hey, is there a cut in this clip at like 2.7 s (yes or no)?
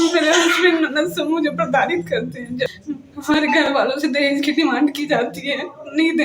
yes